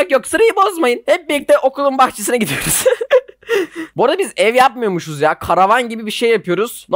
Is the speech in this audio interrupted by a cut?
no; 0 cuts

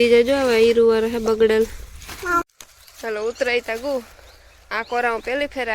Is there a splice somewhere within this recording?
yes; 1 cut; at 2.4 s

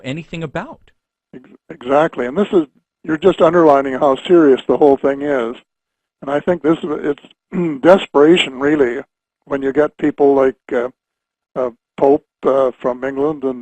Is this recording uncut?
no; 1 cut; at 4.4 s

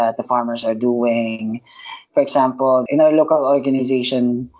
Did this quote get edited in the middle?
yes; 1 cut; at 2.8 s

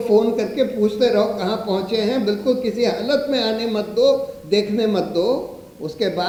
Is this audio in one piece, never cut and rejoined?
yes; 0 cuts

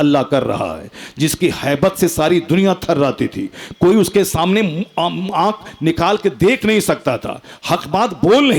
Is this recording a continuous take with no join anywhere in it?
yes; 0 cuts

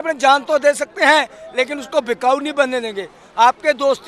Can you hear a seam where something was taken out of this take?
no; 0 cuts

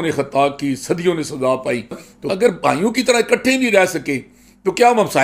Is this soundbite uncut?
no; 1 cut; at 2.1 s

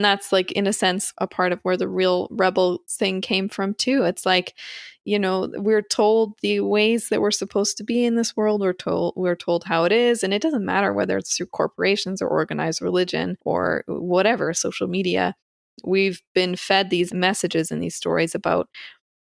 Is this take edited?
yes; 3 cuts; at 1.1 s, 13.3 s, 17.1 s

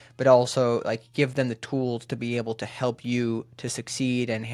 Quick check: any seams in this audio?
no; 0 cuts

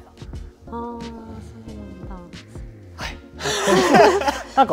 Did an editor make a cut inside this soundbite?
no; 0 cuts

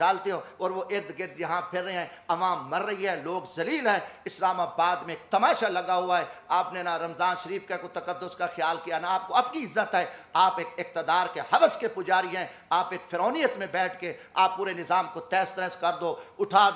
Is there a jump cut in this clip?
no; 0 cuts

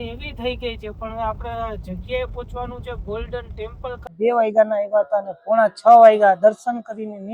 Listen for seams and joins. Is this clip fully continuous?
no; 1 cut; at 4.1 s

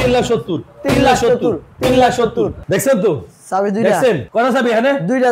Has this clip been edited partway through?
yes; 2 cuts; at 2.6 s, 4.2 s

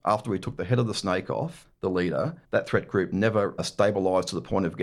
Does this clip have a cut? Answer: yes; 3 cuts; at 1.6 s, 2.4 s, 3.6 s

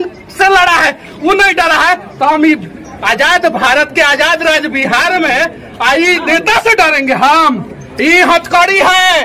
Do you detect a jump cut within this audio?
no; 0 cuts

